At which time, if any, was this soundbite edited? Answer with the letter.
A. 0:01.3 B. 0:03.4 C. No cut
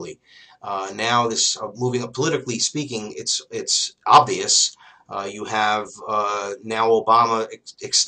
B